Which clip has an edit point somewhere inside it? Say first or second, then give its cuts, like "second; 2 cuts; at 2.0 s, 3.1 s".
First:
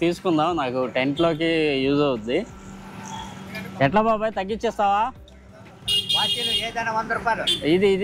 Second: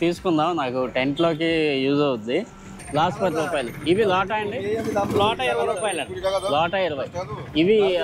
second; 1 cut; at 2.8 s